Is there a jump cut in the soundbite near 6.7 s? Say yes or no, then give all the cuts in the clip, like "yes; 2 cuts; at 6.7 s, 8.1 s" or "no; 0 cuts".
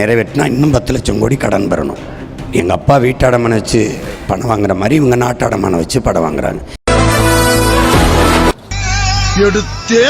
yes; 1 cut; at 6.7 s